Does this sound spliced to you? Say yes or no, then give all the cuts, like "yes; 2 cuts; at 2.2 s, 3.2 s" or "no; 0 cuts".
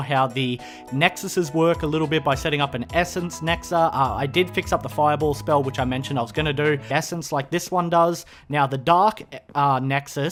no; 0 cuts